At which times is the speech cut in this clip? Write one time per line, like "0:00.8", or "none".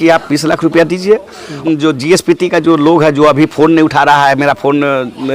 0:01.5